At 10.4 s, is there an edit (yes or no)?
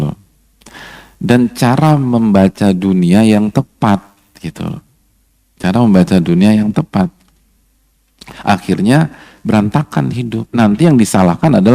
yes